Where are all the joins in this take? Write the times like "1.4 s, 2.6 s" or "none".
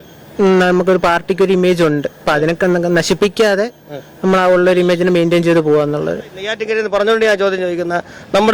6.5 s